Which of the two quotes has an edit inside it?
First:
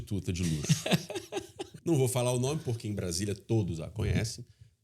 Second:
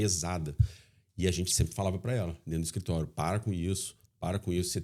first; 1 cut; at 1.7 s

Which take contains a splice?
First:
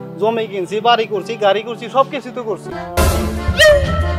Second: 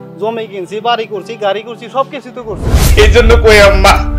second; 1 cut; at 2.7 s

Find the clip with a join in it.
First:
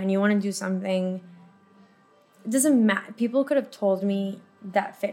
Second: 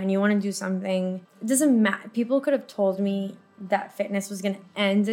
second; 1 cut; at 1.3 s

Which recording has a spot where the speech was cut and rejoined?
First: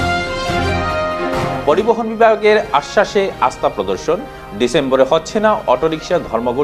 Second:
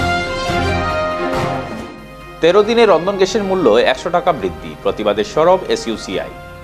second; 1 cut; at 1.6 s

